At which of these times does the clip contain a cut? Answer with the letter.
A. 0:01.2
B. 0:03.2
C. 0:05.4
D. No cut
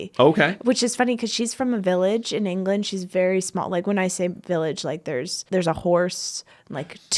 C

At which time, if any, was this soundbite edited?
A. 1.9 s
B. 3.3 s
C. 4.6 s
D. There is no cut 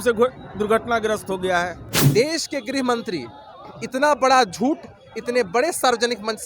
A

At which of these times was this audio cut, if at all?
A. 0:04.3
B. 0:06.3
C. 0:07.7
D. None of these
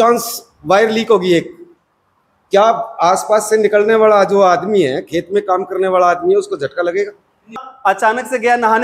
C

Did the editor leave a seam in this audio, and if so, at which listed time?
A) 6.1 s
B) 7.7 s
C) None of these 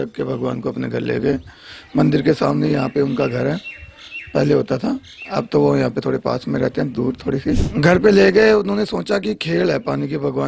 B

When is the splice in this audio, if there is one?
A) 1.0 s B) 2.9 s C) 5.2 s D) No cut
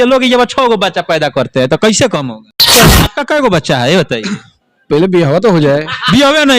B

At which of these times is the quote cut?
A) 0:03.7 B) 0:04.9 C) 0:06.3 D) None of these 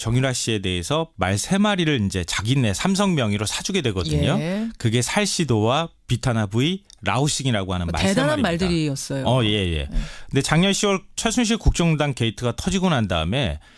D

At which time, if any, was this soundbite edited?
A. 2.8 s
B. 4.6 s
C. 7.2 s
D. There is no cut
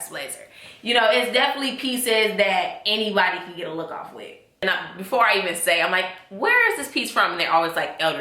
B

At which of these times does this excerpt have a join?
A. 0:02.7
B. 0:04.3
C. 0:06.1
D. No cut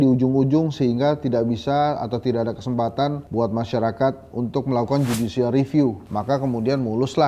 D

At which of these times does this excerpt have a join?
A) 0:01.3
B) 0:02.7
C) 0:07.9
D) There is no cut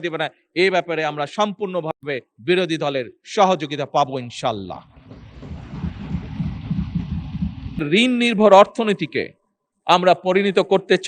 C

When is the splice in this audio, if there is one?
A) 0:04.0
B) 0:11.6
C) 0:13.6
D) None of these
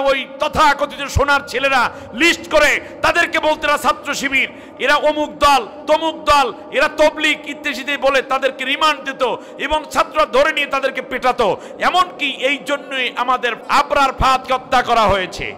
C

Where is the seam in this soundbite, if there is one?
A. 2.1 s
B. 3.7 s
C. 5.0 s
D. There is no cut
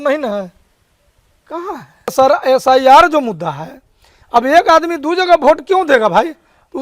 A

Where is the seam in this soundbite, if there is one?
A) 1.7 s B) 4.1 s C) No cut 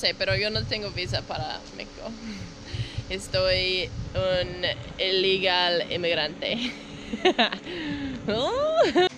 C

